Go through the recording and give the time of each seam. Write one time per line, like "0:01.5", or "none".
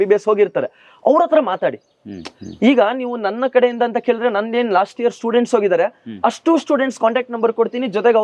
none